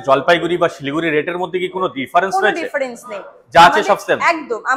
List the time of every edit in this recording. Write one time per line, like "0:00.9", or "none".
none